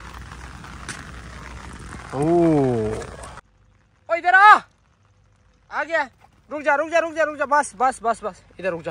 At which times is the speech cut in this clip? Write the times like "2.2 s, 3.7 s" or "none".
3.5 s